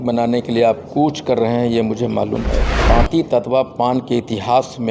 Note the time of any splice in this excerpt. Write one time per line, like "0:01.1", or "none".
0:02.7